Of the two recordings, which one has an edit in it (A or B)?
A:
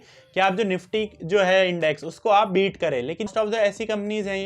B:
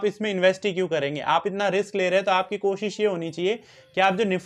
A